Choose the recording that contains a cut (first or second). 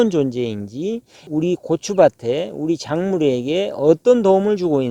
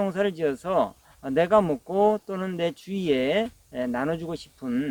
first